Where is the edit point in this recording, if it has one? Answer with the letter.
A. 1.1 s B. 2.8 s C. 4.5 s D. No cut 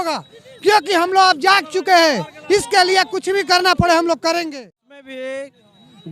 C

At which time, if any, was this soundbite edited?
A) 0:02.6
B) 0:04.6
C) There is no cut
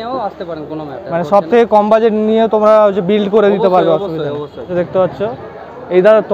B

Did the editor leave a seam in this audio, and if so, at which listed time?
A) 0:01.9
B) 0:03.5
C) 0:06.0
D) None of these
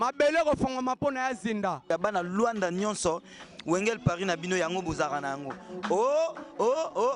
A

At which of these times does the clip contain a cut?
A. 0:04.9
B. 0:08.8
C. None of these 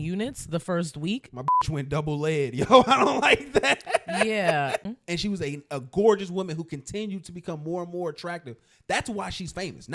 A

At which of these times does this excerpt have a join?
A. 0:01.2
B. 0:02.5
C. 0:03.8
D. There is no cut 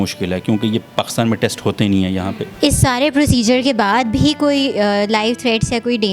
B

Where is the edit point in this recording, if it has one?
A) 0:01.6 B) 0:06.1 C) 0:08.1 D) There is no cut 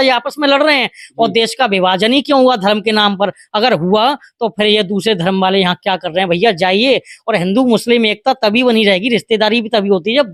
D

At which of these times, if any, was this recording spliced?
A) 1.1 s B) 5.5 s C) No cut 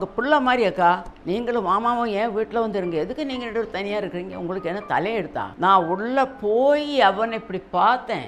B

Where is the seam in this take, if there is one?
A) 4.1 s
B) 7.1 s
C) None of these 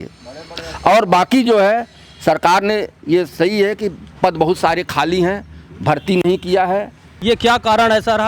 B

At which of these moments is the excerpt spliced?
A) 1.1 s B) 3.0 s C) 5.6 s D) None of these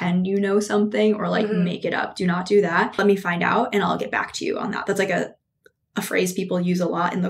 B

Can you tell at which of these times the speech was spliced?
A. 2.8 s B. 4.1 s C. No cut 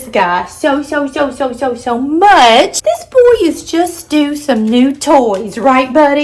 A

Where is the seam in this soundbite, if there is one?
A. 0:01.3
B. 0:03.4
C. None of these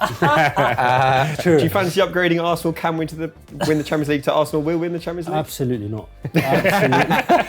A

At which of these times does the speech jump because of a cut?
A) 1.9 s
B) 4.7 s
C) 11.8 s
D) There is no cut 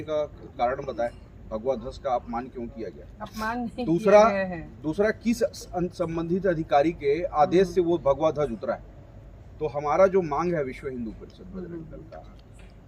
D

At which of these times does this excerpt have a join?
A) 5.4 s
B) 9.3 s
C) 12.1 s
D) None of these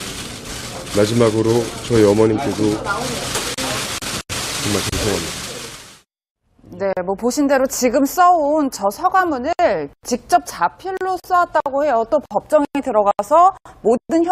B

